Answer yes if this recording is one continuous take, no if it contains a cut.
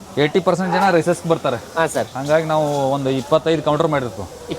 yes